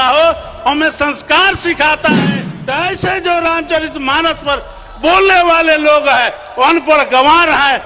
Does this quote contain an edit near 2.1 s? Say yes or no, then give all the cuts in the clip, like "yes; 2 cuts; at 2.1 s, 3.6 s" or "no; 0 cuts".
yes; 1 cut; at 2.1 s